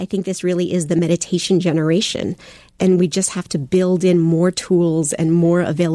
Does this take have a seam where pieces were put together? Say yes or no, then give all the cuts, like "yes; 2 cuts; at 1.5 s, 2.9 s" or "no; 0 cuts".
yes; 2 cuts; at 1.0 s, 2.7 s